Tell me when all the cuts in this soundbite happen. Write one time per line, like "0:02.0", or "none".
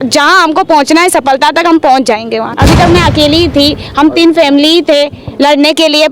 0:02.5